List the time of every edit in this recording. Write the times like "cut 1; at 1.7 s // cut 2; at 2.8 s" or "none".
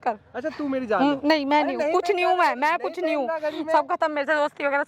none